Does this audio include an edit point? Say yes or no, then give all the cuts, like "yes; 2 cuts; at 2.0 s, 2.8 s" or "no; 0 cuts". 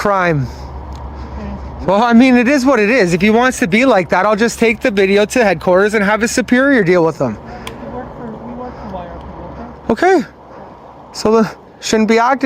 no; 0 cuts